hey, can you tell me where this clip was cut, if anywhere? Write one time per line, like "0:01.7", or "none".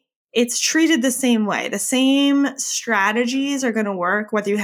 none